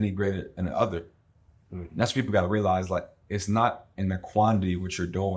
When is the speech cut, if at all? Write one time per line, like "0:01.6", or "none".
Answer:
none